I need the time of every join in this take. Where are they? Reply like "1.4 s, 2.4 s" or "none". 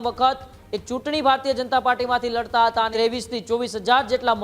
2.9 s